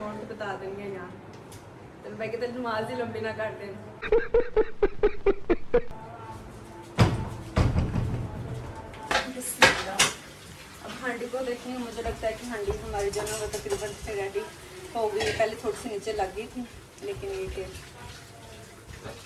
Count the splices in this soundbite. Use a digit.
0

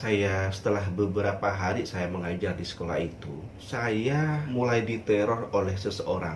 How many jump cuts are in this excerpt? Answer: 2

